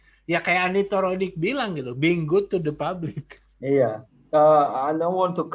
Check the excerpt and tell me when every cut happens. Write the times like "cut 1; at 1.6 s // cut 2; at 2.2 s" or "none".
none